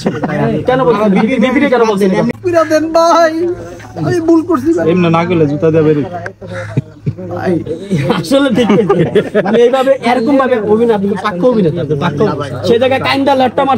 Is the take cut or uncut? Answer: cut